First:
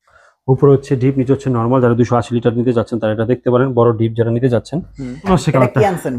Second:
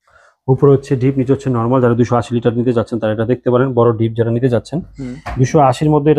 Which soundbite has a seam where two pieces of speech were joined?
first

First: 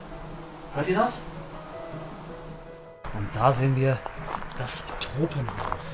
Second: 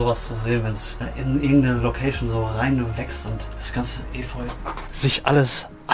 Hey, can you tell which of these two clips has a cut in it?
first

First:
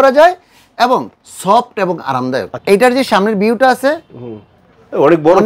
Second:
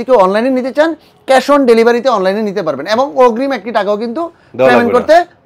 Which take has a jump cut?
first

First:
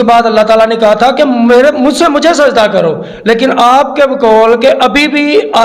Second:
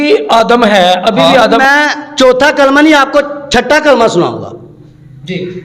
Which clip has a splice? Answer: second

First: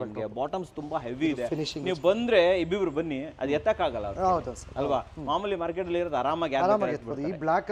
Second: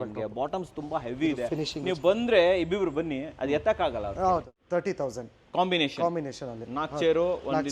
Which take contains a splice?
second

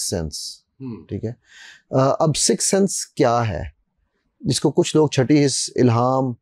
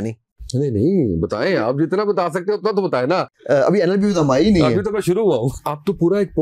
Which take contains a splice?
second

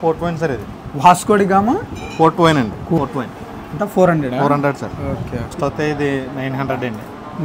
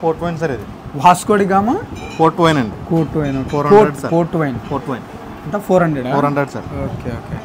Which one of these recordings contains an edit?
first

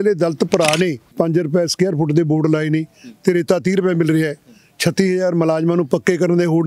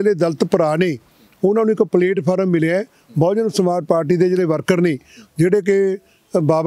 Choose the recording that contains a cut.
first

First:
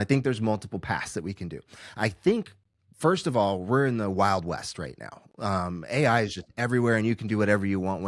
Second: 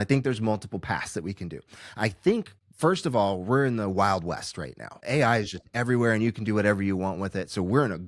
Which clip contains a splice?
second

